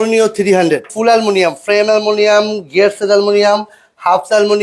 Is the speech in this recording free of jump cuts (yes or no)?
no